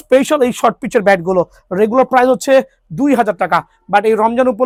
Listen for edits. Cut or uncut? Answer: uncut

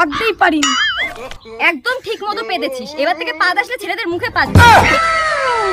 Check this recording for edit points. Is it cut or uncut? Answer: cut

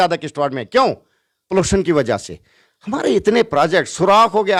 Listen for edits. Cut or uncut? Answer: uncut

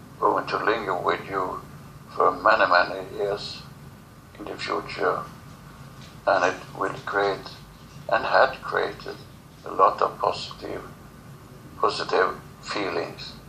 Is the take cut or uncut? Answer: cut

